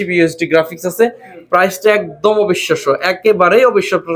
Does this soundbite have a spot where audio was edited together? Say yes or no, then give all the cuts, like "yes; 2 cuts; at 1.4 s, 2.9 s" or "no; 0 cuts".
no; 0 cuts